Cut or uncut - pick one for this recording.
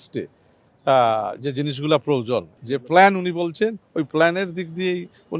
cut